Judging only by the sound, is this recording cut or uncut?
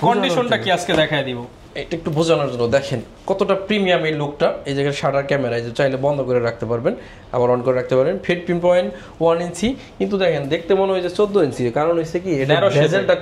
uncut